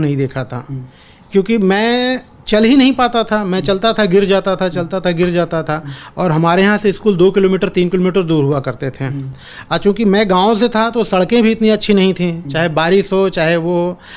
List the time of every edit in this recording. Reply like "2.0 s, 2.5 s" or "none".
none

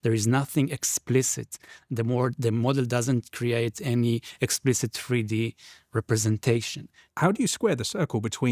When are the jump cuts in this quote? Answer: 7.0 s

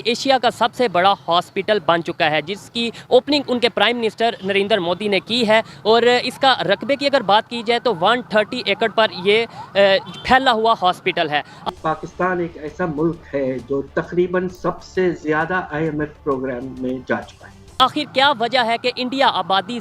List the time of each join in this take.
11.7 s, 17.8 s

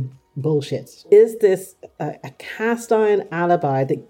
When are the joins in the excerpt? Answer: 1.0 s

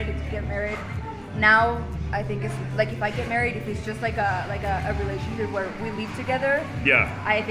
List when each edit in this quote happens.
none

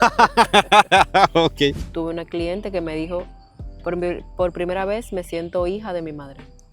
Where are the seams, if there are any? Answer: 1.9 s

